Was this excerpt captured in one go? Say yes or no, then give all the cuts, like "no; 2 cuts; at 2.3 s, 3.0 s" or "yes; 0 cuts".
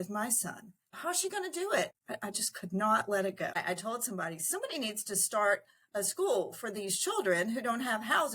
no; 3 cuts; at 1.0 s, 1.9 s, 3.5 s